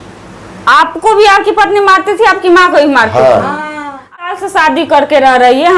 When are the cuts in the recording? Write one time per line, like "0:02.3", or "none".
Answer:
0:04.3